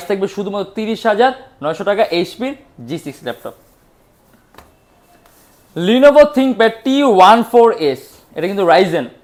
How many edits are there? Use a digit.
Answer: 0